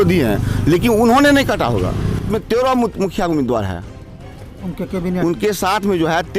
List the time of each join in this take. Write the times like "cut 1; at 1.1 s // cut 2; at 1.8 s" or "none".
cut 1; at 2.3 s